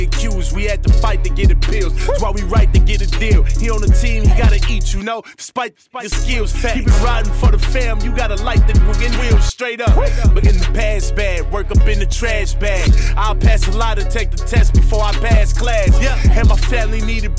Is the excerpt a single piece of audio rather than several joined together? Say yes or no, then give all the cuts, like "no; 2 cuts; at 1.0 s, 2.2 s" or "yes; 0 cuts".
yes; 0 cuts